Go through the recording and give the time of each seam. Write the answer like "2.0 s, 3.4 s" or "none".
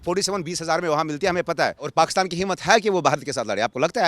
1.9 s